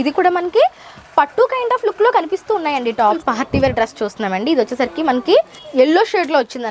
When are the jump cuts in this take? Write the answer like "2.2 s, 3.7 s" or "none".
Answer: 3.2 s, 5.6 s